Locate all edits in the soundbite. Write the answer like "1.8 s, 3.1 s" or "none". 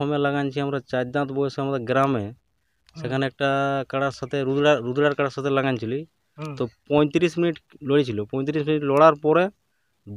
none